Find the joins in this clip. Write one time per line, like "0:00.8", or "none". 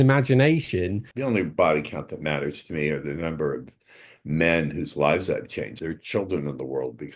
0:01.1
0:05.7